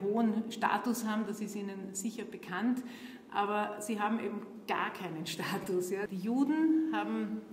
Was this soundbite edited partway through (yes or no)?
yes